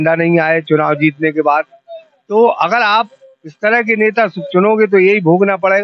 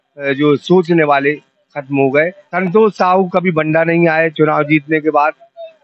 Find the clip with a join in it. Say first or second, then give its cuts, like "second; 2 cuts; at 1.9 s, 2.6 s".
second; 1 cut; at 2.4 s